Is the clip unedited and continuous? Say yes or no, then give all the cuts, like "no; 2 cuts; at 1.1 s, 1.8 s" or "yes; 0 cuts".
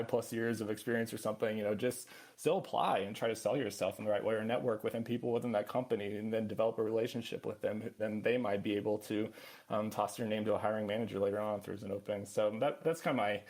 yes; 0 cuts